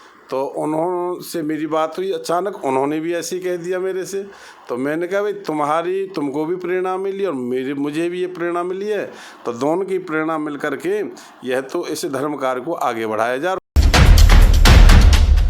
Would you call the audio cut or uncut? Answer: cut